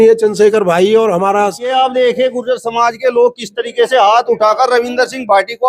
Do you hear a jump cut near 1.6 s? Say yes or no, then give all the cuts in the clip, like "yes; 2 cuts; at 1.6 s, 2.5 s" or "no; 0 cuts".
yes; 1 cut; at 1.6 s